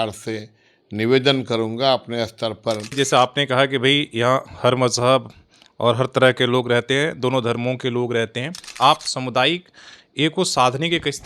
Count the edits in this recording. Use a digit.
2